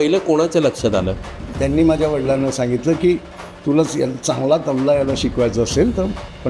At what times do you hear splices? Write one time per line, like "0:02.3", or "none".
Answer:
0:01.2